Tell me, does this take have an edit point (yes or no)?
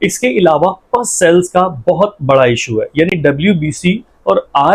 no